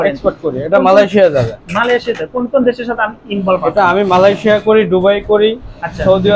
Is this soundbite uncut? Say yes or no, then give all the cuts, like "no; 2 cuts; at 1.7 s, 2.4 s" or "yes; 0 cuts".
yes; 0 cuts